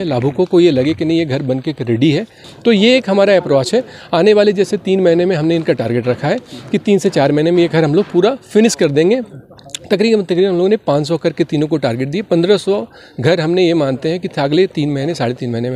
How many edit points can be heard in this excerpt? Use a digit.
1